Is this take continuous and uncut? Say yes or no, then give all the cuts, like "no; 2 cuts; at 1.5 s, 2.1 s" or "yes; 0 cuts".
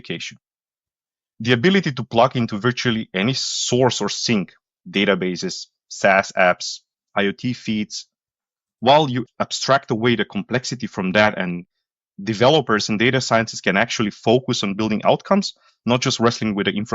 no; 1 cut; at 9.2 s